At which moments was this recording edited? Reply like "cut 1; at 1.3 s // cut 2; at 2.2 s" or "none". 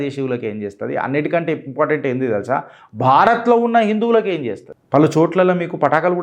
cut 1; at 4.7 s